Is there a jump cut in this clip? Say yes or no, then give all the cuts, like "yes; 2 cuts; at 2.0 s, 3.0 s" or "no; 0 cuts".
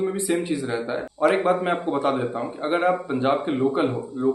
yes; 1 cut; at 1.1 s